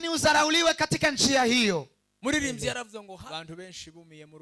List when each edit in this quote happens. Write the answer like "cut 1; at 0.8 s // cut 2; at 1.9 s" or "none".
cut 1; at 3.0 s